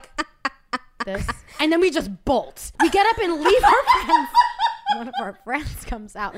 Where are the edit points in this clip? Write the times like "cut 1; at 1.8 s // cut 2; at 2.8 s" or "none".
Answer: cut 1; at 1.6 s // cut 2; at 2.6 s // cut 3; at 5.1 s

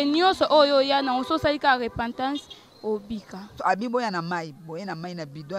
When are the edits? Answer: cut 1; at 3.6 s

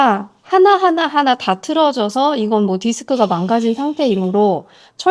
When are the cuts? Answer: none

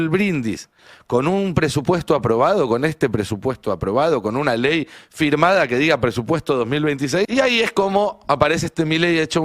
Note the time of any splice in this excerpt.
cut 1; at 7.3 s

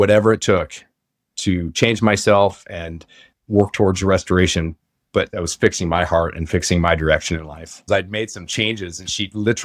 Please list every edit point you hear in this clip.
cut 1; at 3.3 s // cut 2; at 5.4 s // cut 3; at 7.8 s

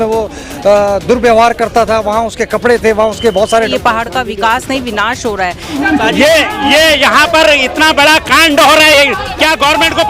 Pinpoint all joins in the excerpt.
cut 1; at 3.7 s // cut 2; at 5.7 s

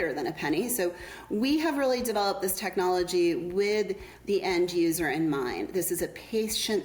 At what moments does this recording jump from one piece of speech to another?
none

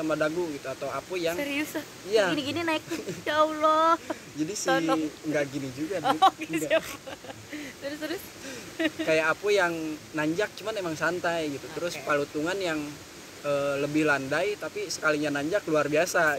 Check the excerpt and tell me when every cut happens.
none

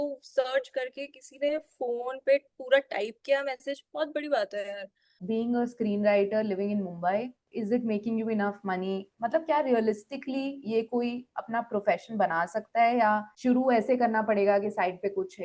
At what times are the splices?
cut 1; at 5.2 s // cut 2; at 7.4 s // cut 3; at 13.3 s

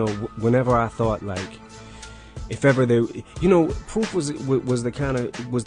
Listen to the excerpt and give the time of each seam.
cut 1; at 4.4 s

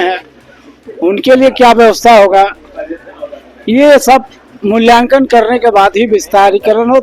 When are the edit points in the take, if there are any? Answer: none

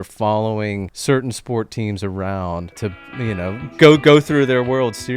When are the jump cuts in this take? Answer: cut 1; at 0.9 s // cut 2; at 2.8 s

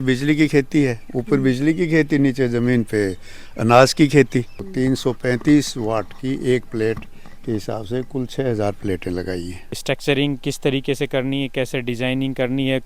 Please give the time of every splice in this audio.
cut 1; at 4.6 s // cut 2; at 9.7 s

